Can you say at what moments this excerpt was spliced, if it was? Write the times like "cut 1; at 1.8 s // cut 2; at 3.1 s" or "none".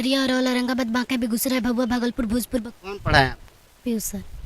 cut 1; at 2.7 s